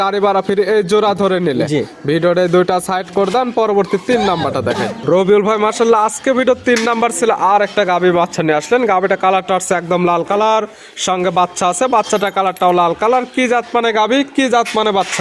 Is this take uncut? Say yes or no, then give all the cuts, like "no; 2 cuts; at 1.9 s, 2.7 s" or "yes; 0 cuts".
yes; 0 cuts